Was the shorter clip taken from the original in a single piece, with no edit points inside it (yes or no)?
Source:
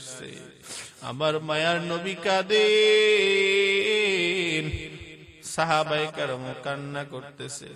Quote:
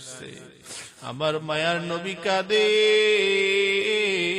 yes